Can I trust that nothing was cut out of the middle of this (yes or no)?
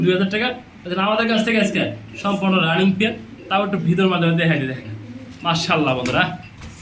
yes